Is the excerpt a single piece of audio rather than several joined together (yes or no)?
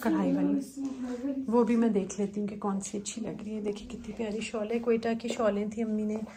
yes